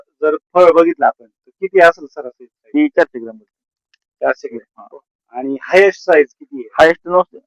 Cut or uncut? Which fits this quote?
uncut